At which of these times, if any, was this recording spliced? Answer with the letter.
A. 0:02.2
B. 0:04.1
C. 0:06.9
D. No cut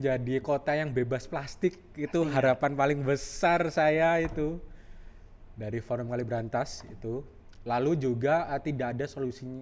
D